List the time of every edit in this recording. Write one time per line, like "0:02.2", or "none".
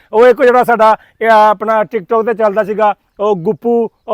none

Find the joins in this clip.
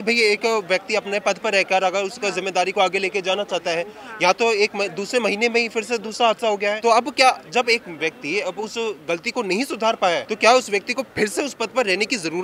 0:06.8
0:10.3

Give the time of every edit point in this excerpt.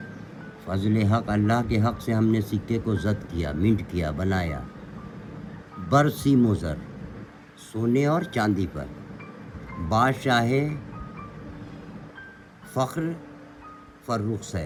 none

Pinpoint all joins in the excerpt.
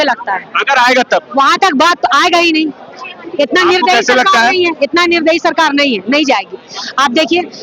none

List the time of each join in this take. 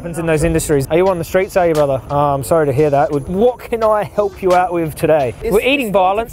0:00.8
0:02.0
0:03.2
0:05.4

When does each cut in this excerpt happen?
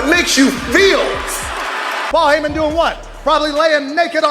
0:02.1

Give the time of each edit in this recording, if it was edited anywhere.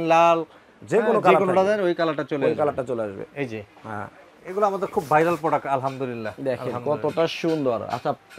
0:04.2

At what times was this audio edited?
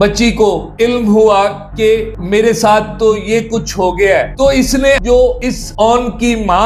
none

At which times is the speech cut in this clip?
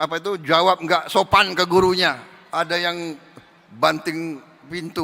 0:02.3

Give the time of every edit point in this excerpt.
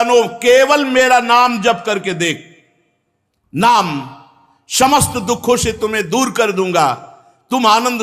none

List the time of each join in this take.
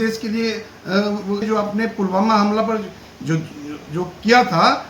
0:01.4

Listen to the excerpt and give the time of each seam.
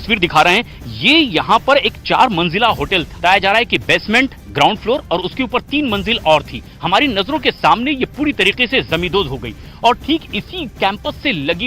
0:03.1

